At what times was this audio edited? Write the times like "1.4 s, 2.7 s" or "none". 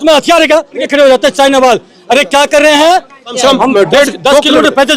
0.9 s, 3.3 s